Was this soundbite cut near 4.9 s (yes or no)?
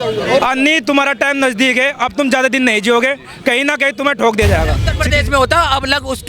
yes